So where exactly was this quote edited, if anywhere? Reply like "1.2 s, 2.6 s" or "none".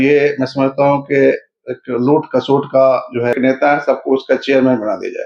3.3 s